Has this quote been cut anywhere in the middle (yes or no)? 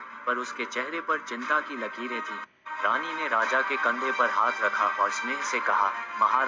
no